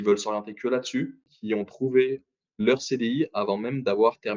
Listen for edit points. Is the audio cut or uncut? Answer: cut